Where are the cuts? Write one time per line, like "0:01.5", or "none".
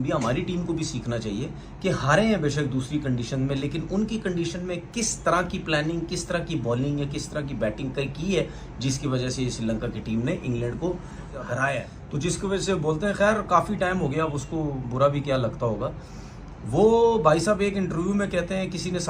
0:12.0